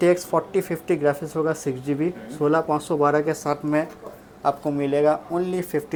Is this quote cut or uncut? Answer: uncut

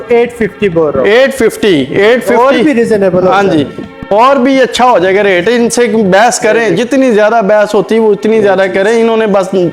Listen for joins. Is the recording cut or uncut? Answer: uncut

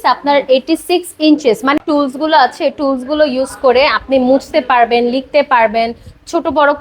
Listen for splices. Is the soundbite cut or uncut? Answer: cut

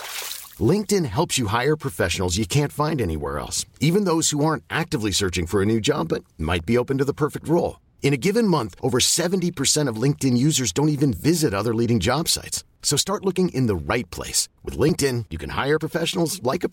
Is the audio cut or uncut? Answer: uncut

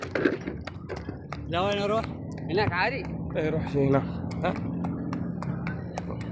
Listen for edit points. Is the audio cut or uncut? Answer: cut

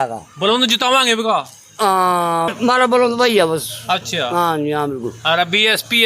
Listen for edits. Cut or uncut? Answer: cut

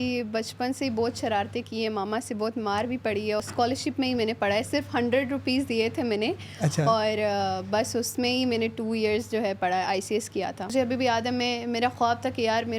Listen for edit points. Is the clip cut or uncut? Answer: cut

